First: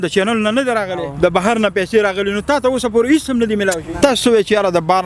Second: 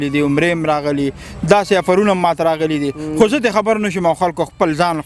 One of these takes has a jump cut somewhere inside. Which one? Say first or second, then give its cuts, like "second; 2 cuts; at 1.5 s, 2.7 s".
first; 2 cuts; at 1.1 s, 3.9 s